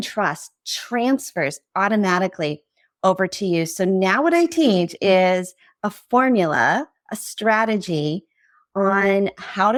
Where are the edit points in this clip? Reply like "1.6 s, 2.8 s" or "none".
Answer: none